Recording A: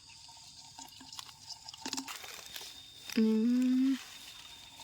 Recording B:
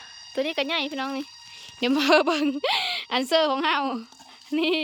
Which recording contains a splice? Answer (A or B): A